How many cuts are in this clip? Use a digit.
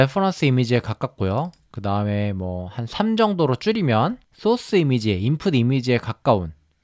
1